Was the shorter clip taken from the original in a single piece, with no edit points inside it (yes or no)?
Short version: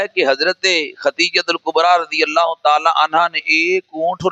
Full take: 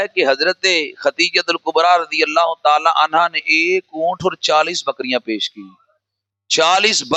yes